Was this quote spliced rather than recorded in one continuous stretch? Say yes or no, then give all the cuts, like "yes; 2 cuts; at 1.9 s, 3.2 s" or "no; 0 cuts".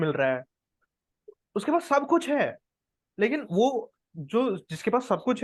no; 0 cuts